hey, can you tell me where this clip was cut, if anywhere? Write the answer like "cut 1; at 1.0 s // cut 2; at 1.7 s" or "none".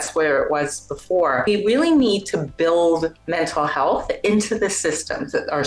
cut 1; at 1.5 s